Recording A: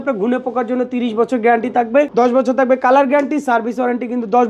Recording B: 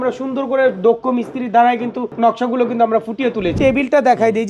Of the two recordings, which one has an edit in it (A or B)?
B